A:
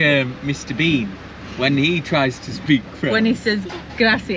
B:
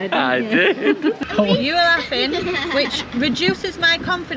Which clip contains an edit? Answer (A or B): B